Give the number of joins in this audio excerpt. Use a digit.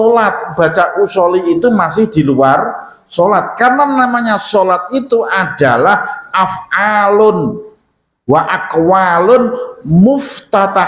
0